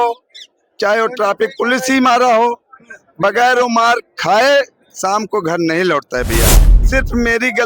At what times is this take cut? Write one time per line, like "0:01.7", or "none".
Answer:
0:06.7